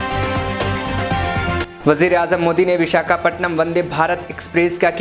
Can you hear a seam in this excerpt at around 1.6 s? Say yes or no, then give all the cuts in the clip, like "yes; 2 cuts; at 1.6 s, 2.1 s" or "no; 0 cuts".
yes; 1 cut; at 1.6 s